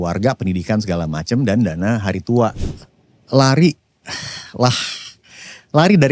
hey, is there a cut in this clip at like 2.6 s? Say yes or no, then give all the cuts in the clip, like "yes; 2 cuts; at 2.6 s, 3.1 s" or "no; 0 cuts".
yes; 1 cut; at 2.6 s